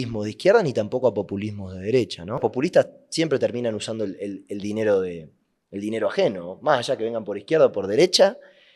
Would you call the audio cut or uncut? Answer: cut